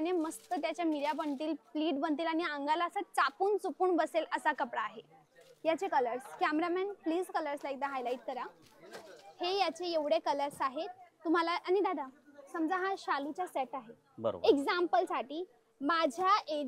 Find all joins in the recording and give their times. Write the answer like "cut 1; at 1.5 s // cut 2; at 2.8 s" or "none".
none